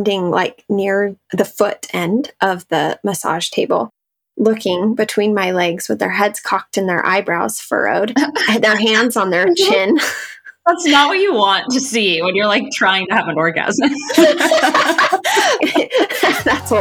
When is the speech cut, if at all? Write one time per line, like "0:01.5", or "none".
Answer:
0:15.6